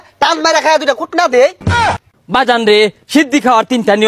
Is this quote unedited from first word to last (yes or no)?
no